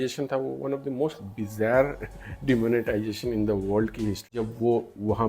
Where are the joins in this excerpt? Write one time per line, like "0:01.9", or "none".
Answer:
0:04.3

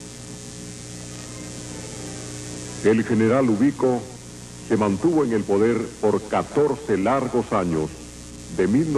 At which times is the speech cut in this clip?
none

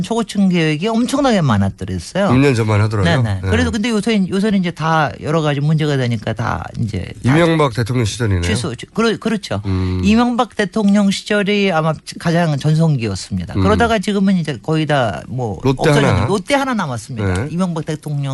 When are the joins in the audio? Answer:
0:07.7

